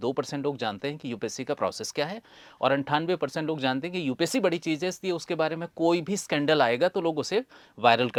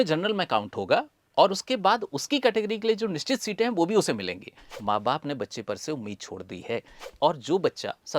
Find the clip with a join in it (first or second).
second